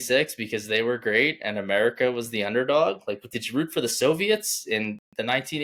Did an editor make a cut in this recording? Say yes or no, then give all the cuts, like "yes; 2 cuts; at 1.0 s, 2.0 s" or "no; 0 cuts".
no; 0 cuts